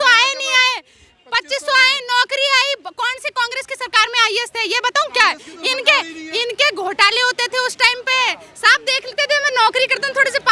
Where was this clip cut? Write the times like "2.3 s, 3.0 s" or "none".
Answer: none

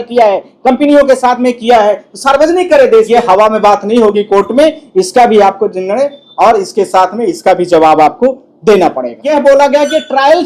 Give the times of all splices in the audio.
3.1 s, 9.2 s

